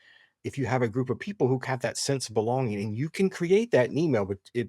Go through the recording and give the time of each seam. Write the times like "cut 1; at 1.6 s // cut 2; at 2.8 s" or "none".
cut 1; at 1.6 s